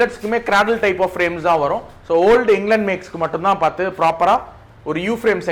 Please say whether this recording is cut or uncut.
uncut